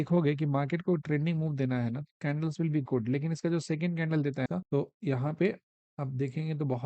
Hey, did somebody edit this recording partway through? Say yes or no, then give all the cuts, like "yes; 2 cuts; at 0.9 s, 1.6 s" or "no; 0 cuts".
yes; 1 cut; at 4.5 s